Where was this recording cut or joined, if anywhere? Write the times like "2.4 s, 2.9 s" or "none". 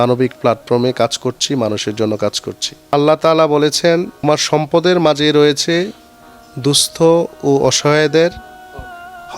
2.9 s, 4.2 s